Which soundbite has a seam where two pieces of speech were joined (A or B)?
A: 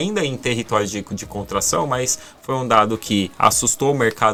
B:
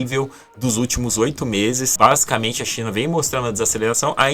B